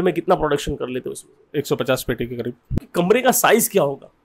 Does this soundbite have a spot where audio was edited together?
yes; 1 cut; at 2.8 s

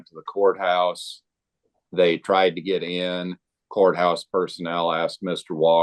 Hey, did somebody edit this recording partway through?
yes; 1 cut; at 3.6 s

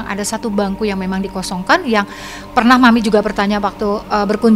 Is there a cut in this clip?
no; 0 cuts

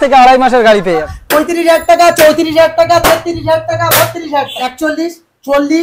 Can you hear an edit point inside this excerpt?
yes; 2 cuts; at 1.1 s, 4.7 s

